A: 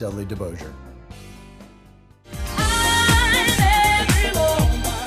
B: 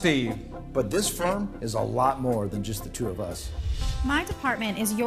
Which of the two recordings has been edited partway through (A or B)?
A